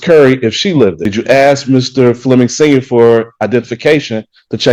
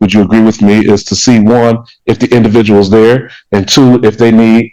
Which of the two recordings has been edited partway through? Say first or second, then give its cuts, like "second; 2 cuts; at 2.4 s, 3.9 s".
first; 1 cut; at 1.1 s